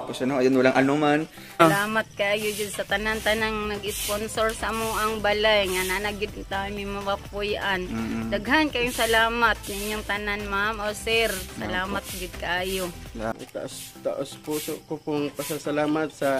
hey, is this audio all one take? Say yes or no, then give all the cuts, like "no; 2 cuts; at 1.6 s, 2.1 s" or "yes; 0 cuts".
no; 2 cuts; at 1.6 s, 13.3 s